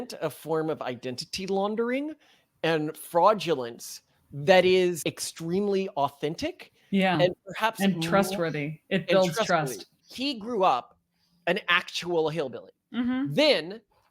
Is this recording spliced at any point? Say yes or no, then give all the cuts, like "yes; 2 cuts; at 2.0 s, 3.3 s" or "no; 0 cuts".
yes; 2 cuts; at 5.0 s, 10.0 s